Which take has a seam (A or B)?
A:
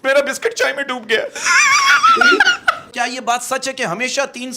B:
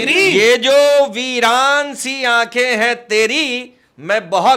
A